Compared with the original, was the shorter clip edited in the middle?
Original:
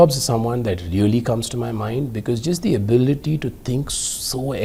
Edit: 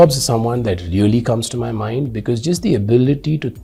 no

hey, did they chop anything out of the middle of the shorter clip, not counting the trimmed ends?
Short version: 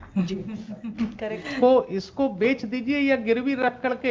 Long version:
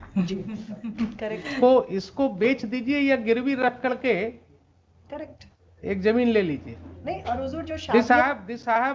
no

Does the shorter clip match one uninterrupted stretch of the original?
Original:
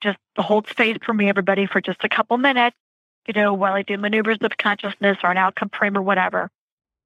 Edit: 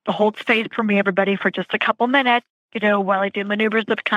no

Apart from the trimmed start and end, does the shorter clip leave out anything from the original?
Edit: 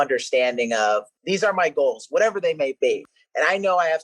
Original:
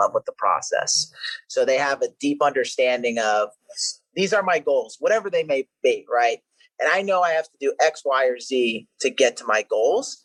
yes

